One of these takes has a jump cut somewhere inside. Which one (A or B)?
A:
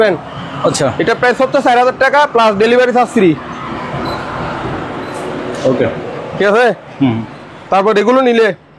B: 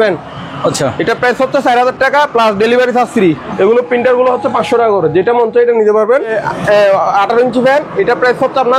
B